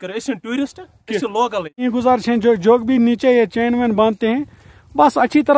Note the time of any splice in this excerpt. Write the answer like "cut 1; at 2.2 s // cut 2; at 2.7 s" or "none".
cut 1; at 1.8 s